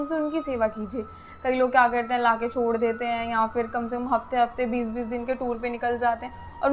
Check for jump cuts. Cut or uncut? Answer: uncut